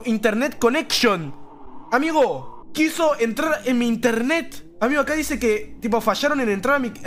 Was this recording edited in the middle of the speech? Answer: no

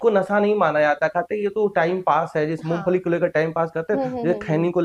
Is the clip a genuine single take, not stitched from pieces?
yes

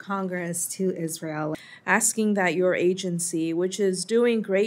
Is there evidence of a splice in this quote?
yes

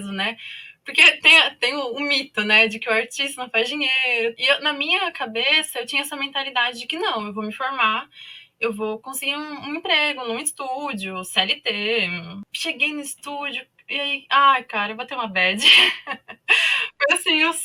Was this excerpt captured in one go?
no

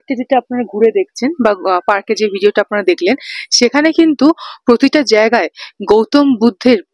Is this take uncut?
yes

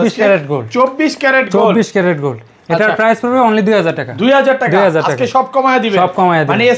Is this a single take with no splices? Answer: yes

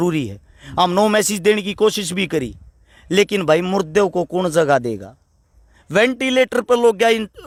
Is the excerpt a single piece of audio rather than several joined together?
yes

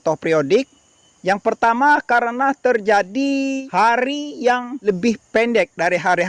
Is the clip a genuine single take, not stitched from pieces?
no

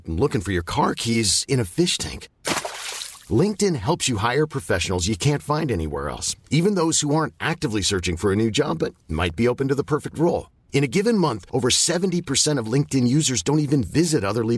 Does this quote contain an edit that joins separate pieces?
no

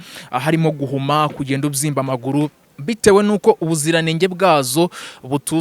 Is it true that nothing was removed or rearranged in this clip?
no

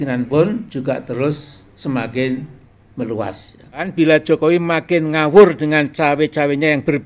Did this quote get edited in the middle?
yes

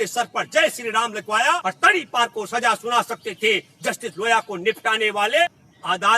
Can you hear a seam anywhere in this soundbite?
yes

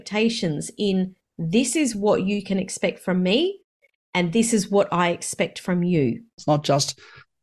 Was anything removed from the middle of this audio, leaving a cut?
yes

